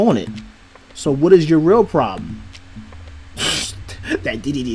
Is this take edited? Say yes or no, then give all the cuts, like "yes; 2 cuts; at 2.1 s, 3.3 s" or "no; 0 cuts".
no; 0 cuts